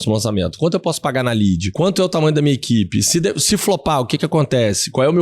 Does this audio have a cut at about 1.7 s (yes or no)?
yes